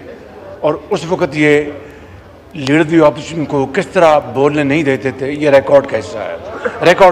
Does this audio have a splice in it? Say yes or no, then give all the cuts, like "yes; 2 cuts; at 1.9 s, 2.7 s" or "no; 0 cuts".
no; 0 cuts